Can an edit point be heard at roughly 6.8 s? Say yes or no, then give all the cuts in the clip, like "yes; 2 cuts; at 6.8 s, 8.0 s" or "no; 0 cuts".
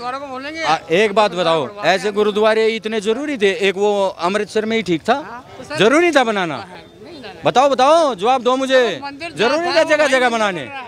no; 0 cuts